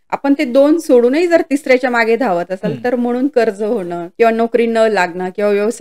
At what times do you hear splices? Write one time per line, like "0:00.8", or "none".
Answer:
0:04.0